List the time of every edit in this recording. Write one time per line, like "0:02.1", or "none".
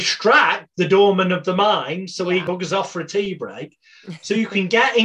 0:02.4